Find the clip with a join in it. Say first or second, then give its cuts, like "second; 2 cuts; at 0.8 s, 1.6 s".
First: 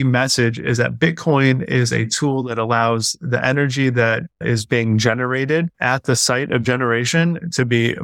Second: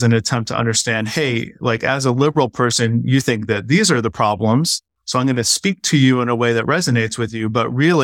first; 2 cuts; at 4.4 s, 5.8 s